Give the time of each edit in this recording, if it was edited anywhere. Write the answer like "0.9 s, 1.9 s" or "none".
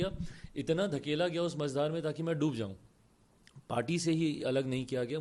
none